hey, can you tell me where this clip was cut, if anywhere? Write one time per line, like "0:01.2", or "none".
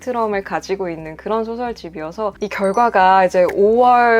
0:02.3